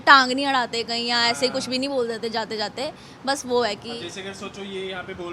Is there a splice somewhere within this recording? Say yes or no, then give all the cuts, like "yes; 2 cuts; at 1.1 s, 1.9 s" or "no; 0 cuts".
no; 0 cuts